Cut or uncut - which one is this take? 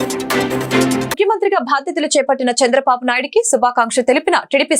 cut